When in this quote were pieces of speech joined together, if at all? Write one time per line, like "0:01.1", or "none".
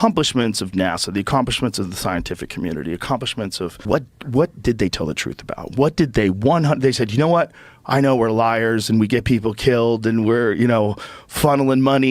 0:03.8